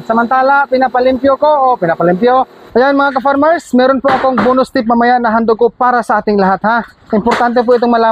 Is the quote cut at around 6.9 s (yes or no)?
yes